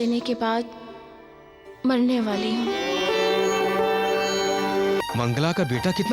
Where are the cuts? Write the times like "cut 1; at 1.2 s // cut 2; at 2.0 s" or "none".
cut 1; at 5.0 s